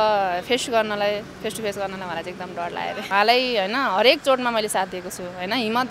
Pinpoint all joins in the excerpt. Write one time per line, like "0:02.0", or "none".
0:03.1